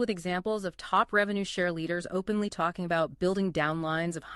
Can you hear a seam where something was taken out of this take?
no; 0 cuts

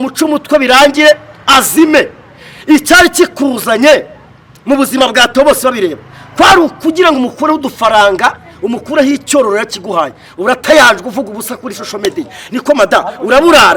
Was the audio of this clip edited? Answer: no; 0 cuts

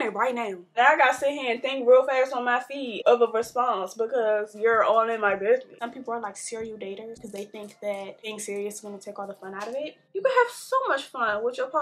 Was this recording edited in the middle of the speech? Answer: yes; 6 cuts; at 0.8 s, 3.0 s, 5.8 s, 7.2 s, 8.3 s, 10.0 s

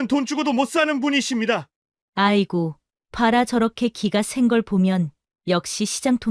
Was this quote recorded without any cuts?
yes; 0 cuts

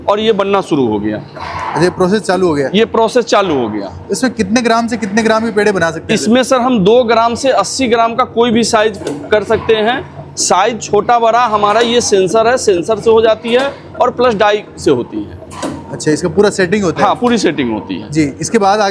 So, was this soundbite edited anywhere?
no; 0 cuts

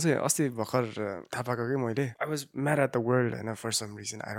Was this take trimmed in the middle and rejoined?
yes; 2 cuts; at 1.3 s, 2.2 s

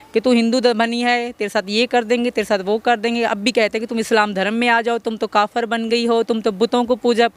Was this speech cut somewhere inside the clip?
no; 0 cuts

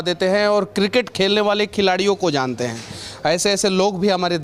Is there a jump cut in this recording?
no; 0 cuts

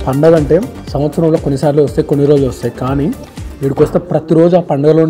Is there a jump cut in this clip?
no; 0 cuts

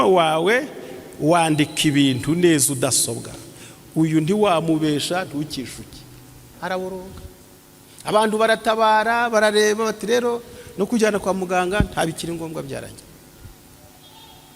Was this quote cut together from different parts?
yes; 1 cut; at 6.4 s

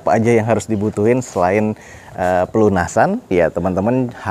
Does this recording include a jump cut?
no; 0 cuts

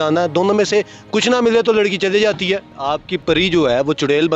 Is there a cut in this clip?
yes; 1 cut; at 2.7 s

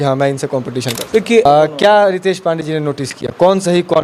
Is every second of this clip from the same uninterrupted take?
no; 1 cut; at 1.5 s

